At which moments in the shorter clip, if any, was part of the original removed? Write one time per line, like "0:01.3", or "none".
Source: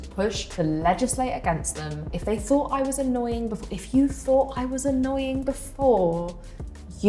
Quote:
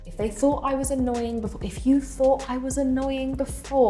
none